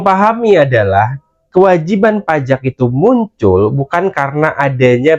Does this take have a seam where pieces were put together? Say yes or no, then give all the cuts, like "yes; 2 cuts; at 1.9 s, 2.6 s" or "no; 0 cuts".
no; 0 cuts